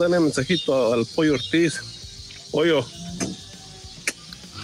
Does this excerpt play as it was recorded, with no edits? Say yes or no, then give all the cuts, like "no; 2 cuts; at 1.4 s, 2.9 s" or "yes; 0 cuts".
yes; 0 cuts